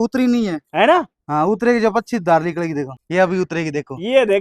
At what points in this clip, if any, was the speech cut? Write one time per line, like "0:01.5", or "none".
0:03.0